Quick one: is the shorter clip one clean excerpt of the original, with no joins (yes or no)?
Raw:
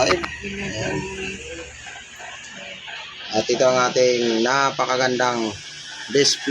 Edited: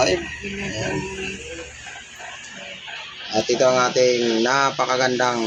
yes